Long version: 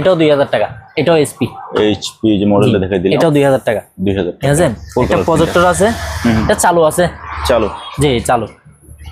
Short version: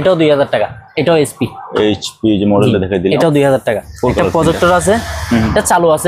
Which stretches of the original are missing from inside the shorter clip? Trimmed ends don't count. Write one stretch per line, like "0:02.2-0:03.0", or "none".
0:03.9-0:04.8